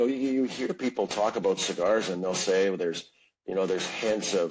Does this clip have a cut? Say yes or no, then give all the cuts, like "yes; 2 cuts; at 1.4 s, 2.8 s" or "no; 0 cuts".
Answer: no; 0 cuts